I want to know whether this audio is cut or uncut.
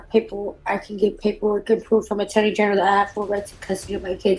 uncut